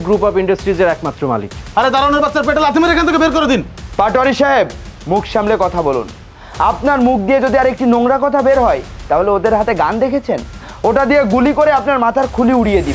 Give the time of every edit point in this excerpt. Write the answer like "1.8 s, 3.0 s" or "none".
1.5 s